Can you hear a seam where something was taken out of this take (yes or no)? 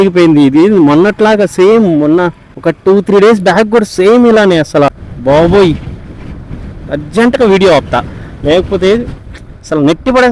yes